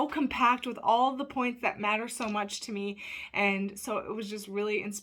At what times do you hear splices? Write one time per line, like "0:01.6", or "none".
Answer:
none